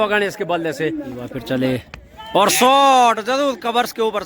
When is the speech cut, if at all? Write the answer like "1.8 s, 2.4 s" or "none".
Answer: 1.3 s